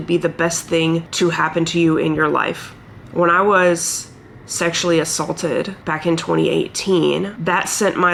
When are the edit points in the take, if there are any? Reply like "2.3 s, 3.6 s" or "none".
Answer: none